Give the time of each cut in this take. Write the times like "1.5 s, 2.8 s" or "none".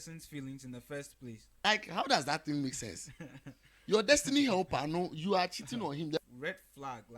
1.5 s, 6.2 s